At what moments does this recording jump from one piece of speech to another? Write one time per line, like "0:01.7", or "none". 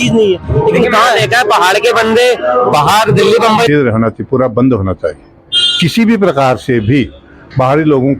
0:03.7